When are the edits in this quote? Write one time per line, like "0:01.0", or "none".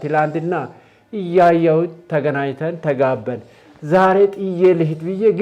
none